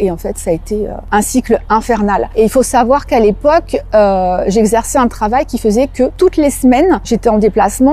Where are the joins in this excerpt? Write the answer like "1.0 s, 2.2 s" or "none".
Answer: 1.0 s, 2.3 s, 6.1 s, 7.1 s